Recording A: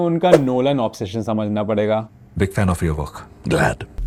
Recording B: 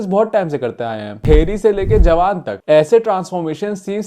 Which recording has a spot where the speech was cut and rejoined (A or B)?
B